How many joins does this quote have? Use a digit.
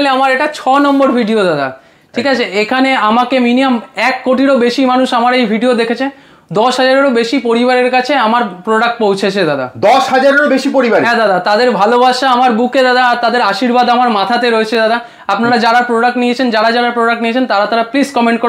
0